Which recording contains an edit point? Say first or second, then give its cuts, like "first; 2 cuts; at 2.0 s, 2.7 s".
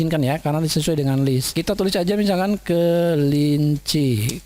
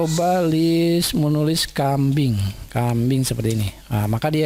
first; 1 cut; at 1.5 s